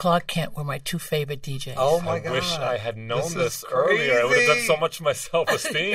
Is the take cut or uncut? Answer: uncut